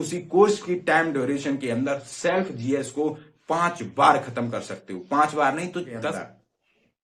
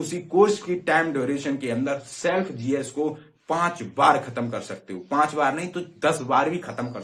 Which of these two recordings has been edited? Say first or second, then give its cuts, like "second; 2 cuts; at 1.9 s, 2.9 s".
first; 1 cut; at 6.0 s